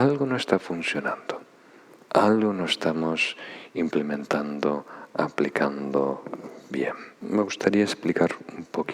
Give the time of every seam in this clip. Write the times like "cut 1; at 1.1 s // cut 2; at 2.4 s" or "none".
cut 1; at 7.1 s